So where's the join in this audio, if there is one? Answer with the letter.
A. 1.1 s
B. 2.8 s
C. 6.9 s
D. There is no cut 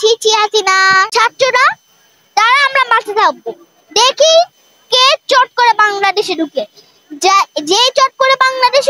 A